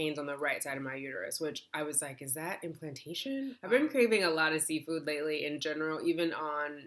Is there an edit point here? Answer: yes; 1 cut; at 3.6 s

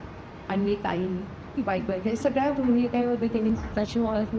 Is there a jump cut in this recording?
yes; 1 cut; at 3.5 s

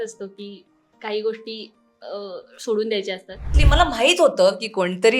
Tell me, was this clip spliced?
yes; 1 cut; at 3.6 s

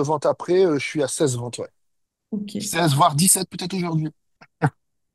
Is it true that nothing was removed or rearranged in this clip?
yes; 0 cuts

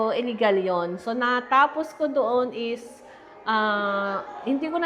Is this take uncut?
yes; 0 cuts

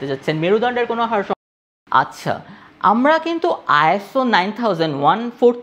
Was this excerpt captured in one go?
no; 1 cut; at 1.4 s

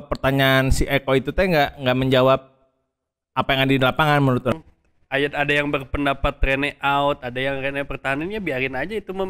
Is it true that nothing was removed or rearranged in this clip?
no; 1 cut; at 4.5 s

